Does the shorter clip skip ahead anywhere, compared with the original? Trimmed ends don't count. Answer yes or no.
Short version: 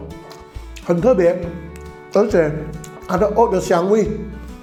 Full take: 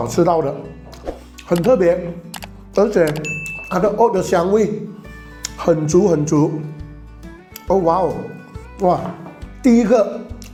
no